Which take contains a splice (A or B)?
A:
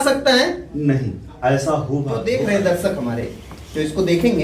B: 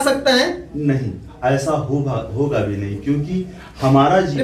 A